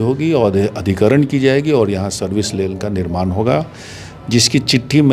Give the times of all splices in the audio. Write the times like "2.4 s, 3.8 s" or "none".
none

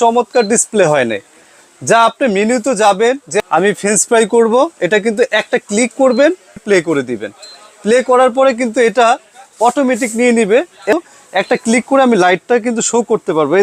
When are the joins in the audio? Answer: 3.3 s, 6.6 s, 10.9 s

